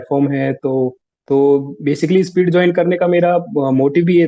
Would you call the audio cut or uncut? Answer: cut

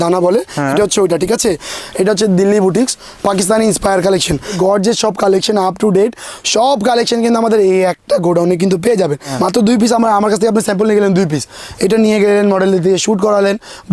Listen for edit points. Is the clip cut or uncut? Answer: cut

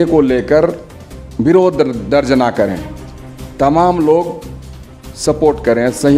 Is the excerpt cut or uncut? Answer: uncut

